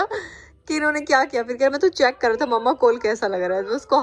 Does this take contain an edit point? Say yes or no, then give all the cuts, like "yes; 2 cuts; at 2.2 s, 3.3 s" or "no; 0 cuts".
no; 0 cuts